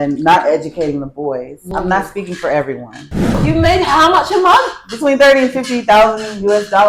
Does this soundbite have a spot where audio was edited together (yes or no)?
yes